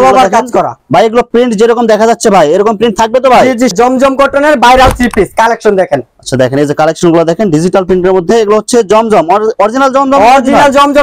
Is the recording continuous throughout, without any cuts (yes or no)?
no